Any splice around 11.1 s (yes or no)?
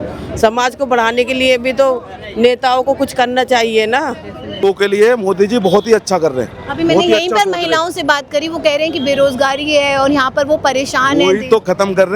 no